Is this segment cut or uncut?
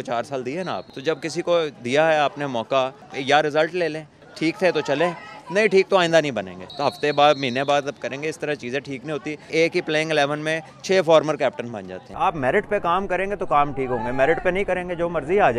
cut